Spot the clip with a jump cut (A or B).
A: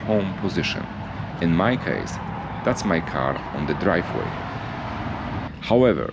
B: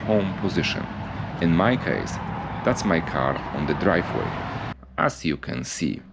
B